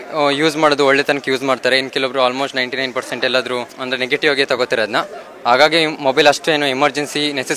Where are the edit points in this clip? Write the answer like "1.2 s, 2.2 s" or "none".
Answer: none